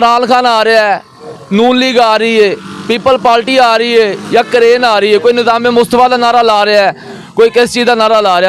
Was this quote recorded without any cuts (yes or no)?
yes